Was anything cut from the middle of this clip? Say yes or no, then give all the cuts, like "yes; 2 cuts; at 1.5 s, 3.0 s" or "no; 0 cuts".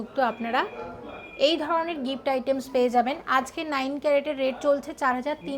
no; 0 cuts